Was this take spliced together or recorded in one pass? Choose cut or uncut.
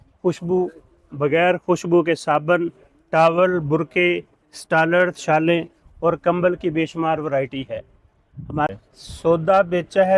cut